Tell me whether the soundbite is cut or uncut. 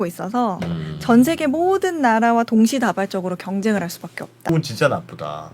cut